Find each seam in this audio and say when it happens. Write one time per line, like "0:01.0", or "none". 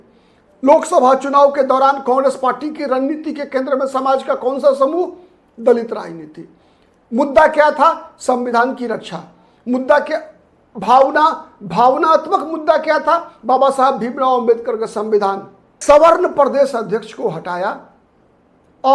0:15.8